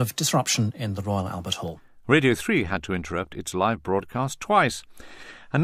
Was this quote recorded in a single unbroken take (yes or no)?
yes